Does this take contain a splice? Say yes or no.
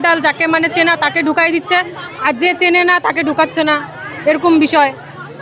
no